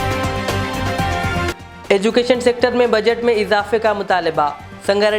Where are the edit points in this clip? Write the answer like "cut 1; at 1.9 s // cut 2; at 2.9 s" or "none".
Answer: cut 1; at 1.5 s